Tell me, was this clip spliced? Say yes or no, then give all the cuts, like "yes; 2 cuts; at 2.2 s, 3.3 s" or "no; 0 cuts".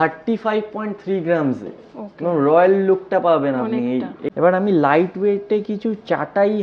yes; 1 cut; at 4.2 s